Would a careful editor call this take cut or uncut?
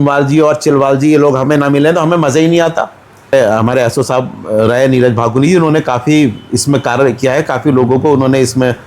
cut